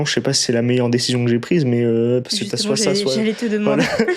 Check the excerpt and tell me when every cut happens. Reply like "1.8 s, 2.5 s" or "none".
none